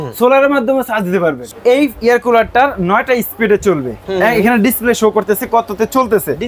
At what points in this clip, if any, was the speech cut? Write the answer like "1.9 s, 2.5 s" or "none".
1.5 s